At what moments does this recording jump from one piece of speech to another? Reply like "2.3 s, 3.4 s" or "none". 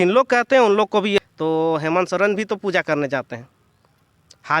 1.2 s